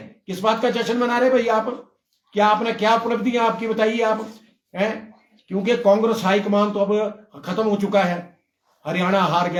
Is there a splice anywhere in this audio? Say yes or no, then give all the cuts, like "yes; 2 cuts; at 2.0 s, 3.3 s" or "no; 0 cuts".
no; 0 cuts